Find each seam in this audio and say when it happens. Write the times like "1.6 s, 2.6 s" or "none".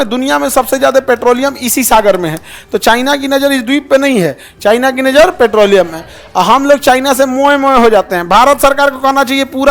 none